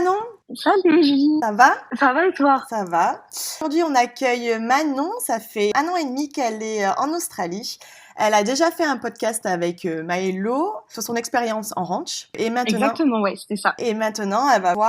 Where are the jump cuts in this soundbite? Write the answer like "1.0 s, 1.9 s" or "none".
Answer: 3.6 s, 5.7 s